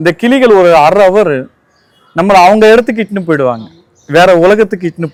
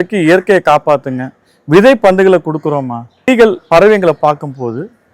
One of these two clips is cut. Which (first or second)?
second